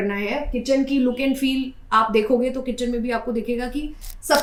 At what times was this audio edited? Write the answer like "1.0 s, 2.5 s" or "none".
none

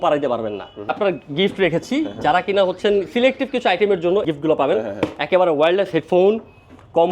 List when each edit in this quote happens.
0.9 s, 4.2 s

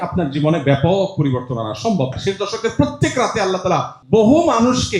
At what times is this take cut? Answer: 2.1 s, 3.9 s

